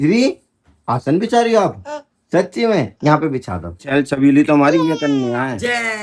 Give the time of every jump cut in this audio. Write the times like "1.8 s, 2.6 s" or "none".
3.7 s

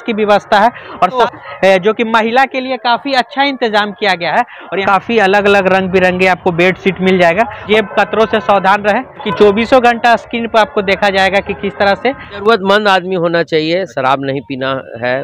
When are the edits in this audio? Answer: 1.2 s, 4.8 s, 7.6 s, 9.3 s, 12.4 s

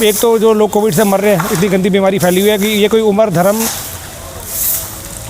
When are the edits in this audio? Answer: none

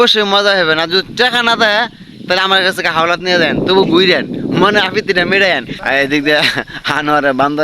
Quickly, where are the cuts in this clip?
5.7 s

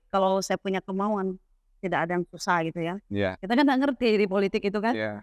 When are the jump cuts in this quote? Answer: 3.3 s

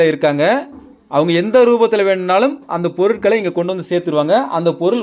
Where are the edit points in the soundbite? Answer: none

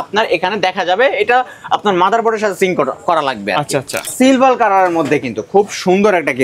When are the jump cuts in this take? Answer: 4.1 s

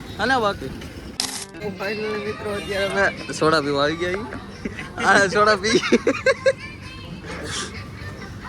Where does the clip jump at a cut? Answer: 1.5 s

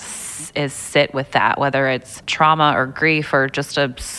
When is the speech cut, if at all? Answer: 2.2 s

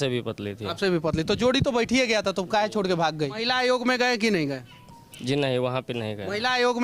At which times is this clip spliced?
3.4 s

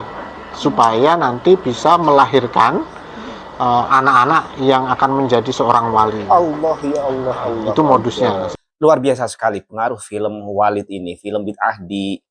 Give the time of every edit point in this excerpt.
8.5 s

